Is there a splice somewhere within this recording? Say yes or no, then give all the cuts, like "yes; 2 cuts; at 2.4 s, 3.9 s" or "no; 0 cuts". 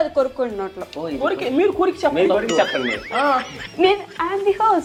no; 0 cuts